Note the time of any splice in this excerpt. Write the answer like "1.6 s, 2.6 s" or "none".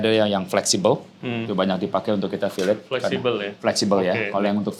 none